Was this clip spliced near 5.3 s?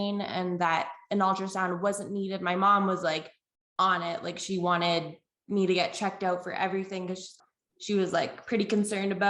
no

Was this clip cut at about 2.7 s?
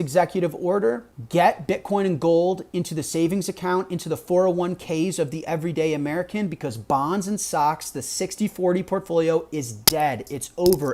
no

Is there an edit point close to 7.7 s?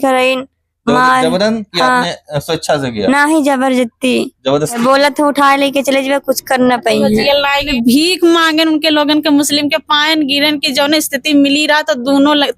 yes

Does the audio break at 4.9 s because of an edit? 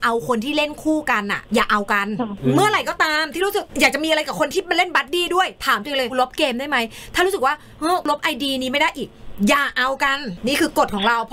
no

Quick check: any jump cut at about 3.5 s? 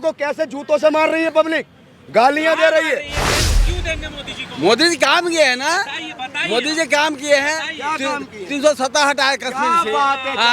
yes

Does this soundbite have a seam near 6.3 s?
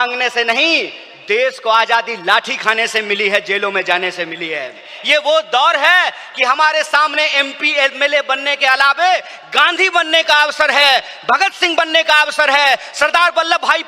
no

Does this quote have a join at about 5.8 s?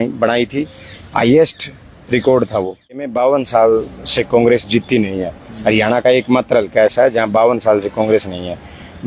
no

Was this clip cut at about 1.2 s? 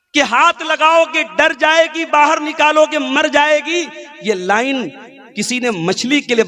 no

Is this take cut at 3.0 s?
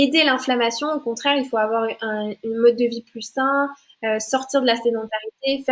no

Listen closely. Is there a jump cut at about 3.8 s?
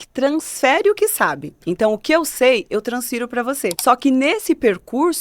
yes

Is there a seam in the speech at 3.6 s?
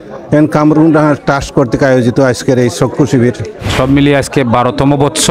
yes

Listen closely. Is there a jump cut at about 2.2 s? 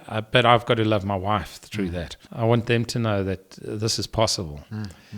yes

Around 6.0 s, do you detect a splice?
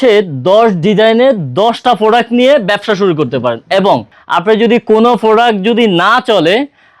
no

